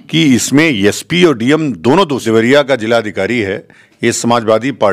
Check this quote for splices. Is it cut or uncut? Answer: cut